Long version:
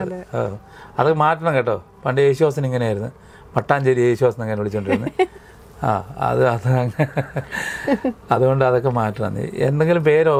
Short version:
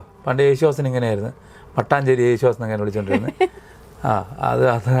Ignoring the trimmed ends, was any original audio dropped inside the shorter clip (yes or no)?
no